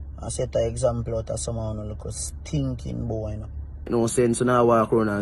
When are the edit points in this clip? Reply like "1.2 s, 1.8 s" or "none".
3.9 s